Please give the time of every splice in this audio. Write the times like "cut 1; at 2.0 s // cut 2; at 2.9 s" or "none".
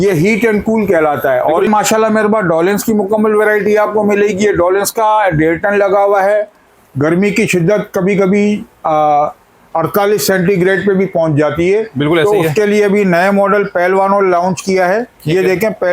cut 1; at 1.7 s // cut 2; at 6.7 s